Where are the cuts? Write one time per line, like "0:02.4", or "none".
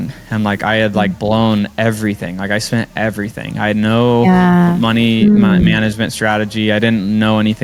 none